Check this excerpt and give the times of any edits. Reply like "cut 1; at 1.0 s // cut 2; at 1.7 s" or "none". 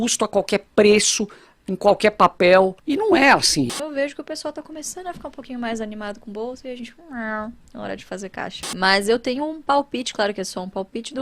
cut 1; at 2.8 s // cut 2; at 3.8 s // cut 3; at 8.6 s